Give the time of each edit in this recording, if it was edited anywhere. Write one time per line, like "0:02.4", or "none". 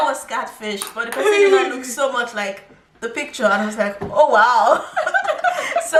none